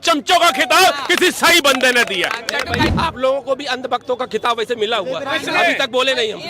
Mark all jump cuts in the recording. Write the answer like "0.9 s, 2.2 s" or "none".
2.9 s

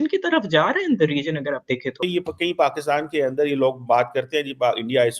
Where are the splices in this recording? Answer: 2.0 s

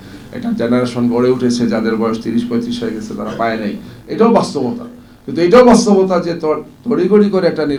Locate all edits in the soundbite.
none

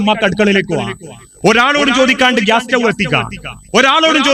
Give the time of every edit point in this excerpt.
none

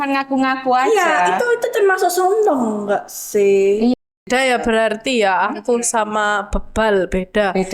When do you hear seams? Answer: 4.0 s

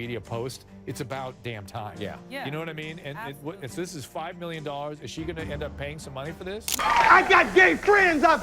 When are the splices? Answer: 6.7 s

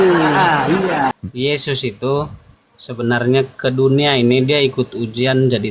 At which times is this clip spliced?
1.2 s

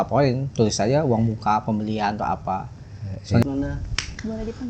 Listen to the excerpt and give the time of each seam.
3.4 s

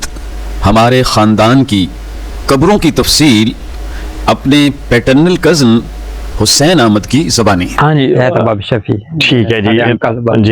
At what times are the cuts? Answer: none

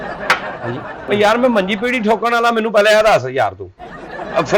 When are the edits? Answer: 1.1 s

